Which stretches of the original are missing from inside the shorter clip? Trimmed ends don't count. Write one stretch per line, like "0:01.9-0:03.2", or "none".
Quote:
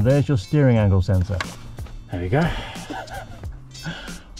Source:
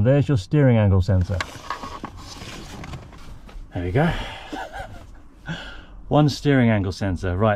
0:01.6-0:03.2